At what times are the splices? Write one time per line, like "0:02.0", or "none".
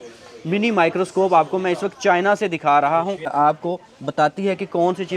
0:03.3